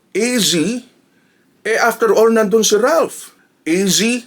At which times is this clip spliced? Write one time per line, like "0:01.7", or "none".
0:03.3

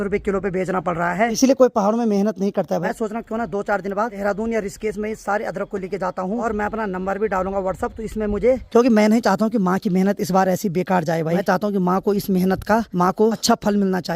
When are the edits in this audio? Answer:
0:01.4
0:02.8
0:04.2
0:06.4
0:08.6
0:11.4
0:13.1

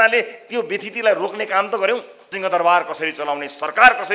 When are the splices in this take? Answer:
0:02.2

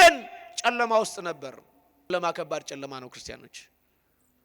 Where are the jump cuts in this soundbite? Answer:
0:02.1

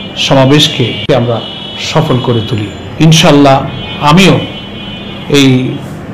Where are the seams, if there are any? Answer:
0:01.1
0:02.8

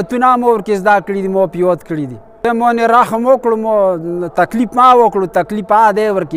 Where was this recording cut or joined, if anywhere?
0:02.4

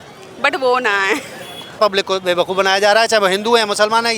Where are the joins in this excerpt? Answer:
0:01.8

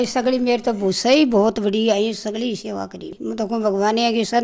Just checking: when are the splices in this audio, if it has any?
0:03.1

